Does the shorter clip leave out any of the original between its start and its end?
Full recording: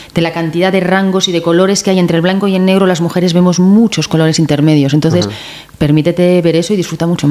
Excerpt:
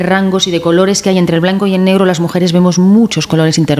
no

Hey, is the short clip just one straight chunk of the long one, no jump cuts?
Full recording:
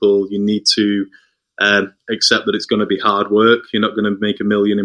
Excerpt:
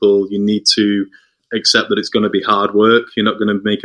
no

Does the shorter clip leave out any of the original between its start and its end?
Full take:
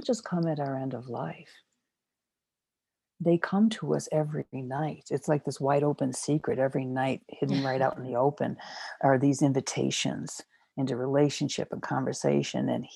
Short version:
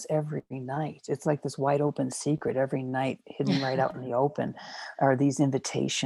no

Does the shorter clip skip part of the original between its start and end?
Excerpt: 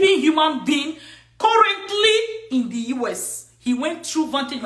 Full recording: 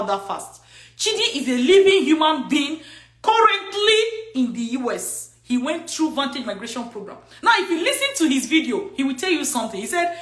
no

